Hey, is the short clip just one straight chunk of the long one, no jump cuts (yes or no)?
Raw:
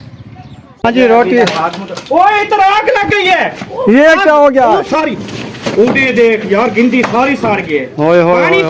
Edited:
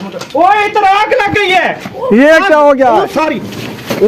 yes